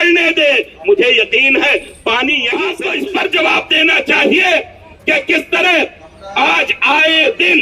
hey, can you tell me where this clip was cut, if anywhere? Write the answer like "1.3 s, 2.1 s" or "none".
2.8 s

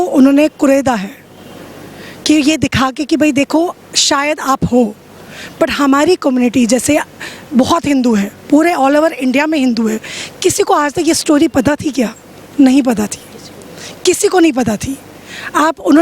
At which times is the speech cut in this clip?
none

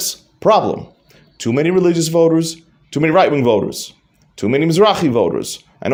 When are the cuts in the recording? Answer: none

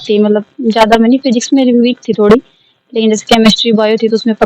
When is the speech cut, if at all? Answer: none

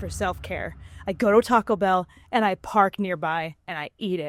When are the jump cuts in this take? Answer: none

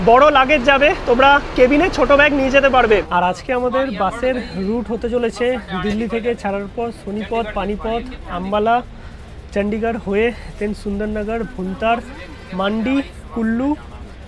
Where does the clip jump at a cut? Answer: 3.1 s

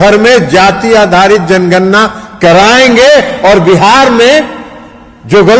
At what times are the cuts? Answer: none

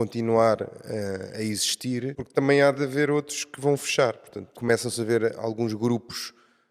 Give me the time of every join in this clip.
2.2 s, 4.6 s

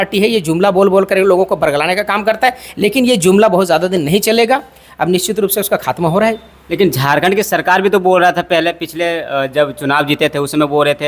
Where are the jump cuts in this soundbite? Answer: none

